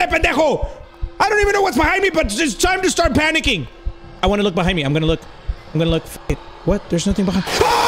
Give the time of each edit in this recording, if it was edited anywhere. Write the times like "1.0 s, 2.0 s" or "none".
6.5 s